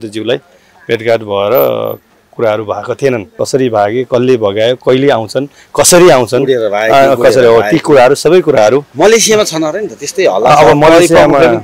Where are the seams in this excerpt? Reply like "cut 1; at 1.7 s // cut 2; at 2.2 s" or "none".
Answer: cut 1; at 3.3 s

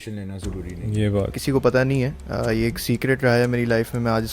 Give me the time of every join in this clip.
cut 1; at 1.4 s

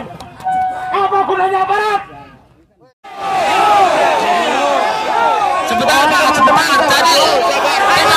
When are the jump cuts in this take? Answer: cut 1; at 3.3 s

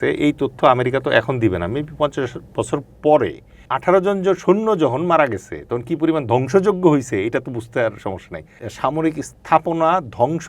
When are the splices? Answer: cut 1; at 3.7 s // cut 2; at 8.6 s

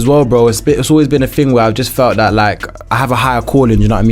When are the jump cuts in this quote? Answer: cut 1; at 2.8 s

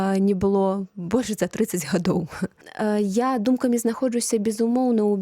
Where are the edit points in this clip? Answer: cut 1; at 2.7 s

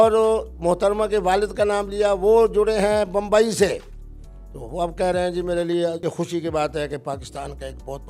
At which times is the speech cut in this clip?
cut 1; at 6.0 s

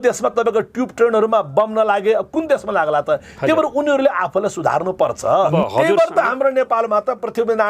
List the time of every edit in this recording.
cut 1; at 5.5 s

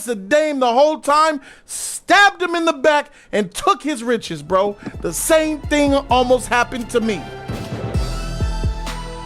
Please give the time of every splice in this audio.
cut 1; at 7.4 s

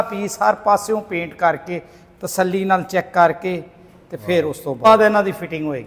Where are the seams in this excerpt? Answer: cut 1; at 4.9 s

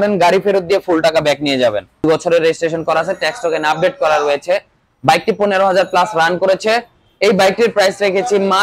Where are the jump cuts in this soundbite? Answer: cut 1; at 2.0 s

